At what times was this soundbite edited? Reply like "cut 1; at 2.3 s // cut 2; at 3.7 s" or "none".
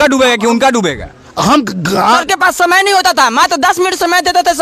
cut 1; at 2.2 s